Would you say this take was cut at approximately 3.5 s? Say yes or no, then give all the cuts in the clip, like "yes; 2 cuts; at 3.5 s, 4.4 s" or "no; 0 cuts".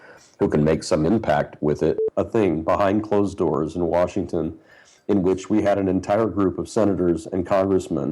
no; 1 cut; at 2.0 s